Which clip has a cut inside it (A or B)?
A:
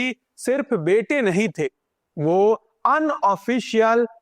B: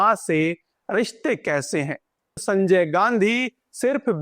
B